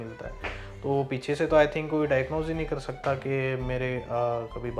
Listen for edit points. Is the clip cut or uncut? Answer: uncut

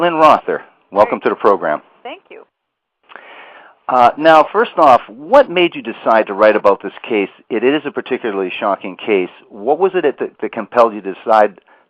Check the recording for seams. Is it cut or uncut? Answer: cut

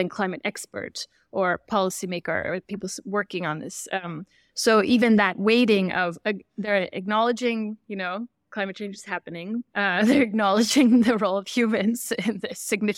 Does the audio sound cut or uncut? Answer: uncut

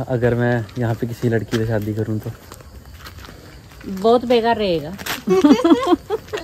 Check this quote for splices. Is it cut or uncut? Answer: uncut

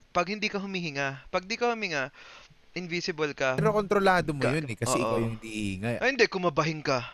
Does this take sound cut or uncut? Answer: cut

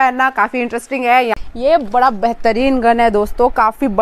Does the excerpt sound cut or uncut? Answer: cut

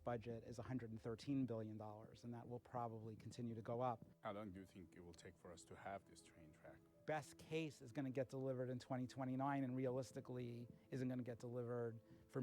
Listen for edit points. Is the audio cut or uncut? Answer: cut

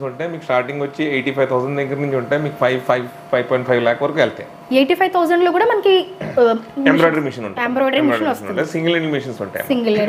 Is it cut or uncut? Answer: uncut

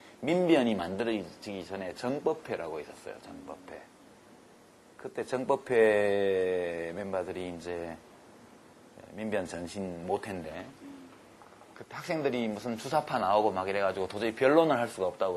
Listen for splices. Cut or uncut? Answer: uncut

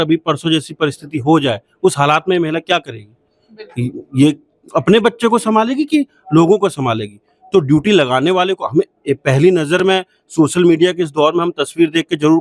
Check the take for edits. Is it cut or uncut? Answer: uncut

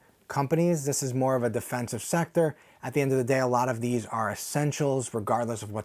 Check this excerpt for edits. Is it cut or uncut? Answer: uncut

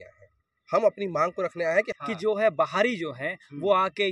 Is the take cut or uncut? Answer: cut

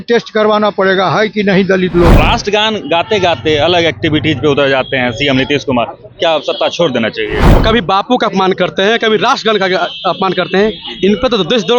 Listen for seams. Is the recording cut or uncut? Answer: cut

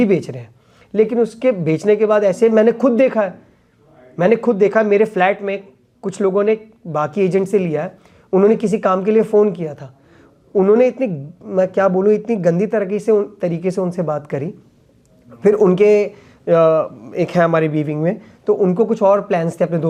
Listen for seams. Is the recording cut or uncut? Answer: uncut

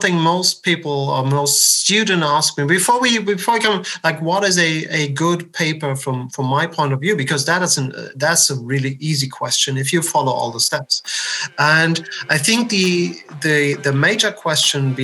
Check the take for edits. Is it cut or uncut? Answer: uncut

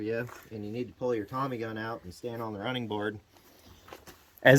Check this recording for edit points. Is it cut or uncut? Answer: uncut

